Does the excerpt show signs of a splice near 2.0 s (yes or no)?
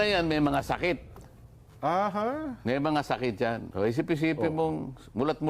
no